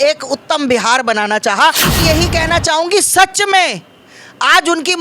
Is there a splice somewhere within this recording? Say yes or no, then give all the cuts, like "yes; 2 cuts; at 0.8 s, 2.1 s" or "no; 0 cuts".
yes; 1 cut; at 2.0 s